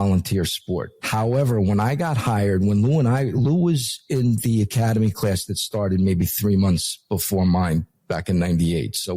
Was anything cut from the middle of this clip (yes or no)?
yes